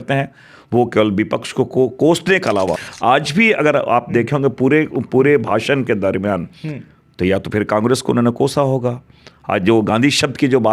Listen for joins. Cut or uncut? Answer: cut